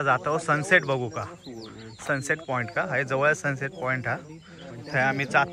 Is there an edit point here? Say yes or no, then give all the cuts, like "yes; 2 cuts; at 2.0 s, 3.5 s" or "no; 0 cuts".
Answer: no; 0 cuts